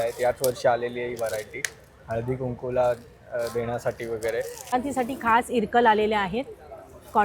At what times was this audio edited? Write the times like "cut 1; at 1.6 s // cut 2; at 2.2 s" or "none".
cut 1; at 4.7 s